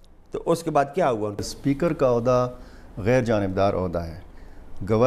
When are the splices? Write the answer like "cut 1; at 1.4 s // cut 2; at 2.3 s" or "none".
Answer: cut 1; at 1.5 s